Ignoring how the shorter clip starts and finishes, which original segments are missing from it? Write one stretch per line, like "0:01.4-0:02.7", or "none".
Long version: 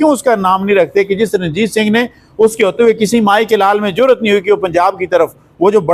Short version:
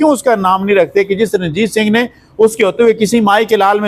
none